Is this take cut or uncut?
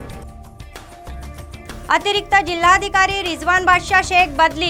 uncut